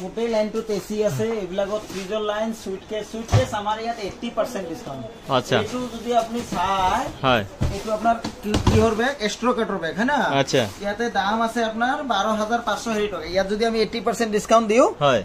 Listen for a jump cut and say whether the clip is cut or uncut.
uncut